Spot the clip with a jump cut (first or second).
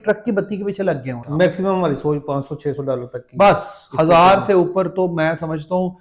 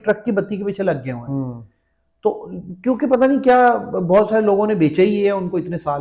first